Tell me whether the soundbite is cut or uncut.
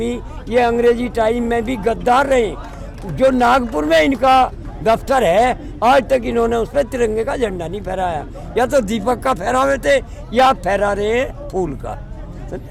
uncut